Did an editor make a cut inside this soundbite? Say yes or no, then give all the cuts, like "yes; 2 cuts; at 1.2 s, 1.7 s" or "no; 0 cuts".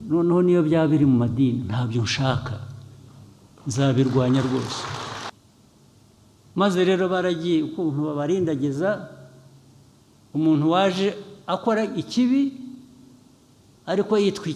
yes; 1 cut; at 5.3 s